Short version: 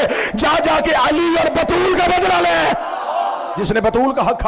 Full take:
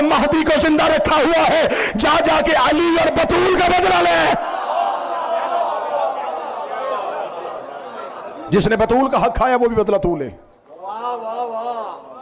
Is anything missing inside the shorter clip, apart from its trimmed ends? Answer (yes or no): yes